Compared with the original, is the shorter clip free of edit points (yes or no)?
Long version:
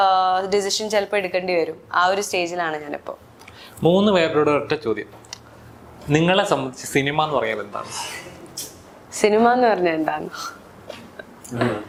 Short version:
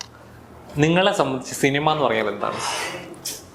yes